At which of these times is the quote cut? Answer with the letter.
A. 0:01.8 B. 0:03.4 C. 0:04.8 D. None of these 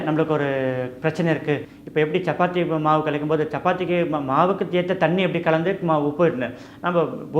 A